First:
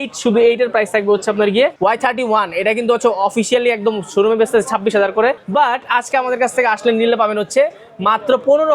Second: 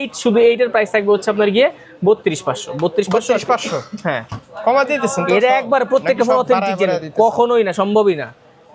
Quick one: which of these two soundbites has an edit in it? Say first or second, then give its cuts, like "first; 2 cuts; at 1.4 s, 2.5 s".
first; 2 cuts; at 1.8 s, 5.4 s